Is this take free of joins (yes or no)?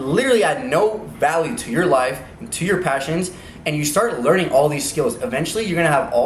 yes